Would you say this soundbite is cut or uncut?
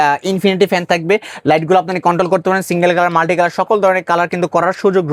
uncut